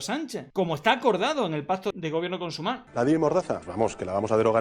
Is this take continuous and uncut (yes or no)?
no